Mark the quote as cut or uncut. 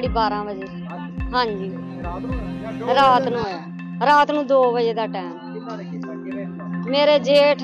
cut